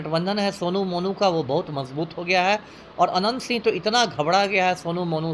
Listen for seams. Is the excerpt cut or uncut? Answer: uncut